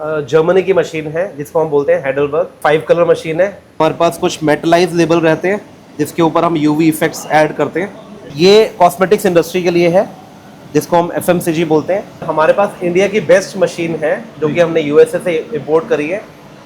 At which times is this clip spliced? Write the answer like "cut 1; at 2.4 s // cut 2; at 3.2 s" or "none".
cut 1; at 2.5 s // cut 2; at 3.8 s // cut 3; at 8.3 s // cut 4; at 12.3 s